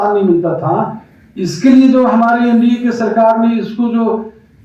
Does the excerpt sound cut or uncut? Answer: uncut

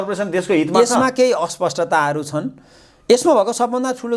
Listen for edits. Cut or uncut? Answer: uncut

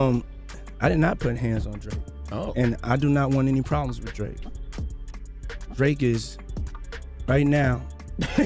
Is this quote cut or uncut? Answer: uncut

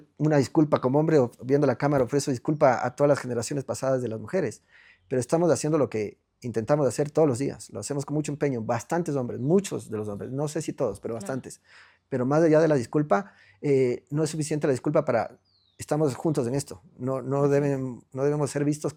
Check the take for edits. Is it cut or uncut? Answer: uncut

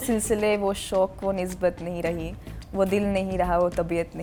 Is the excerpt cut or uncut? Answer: uncut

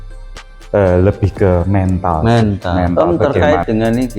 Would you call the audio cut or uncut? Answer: cut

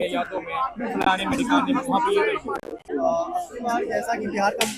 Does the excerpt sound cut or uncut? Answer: cut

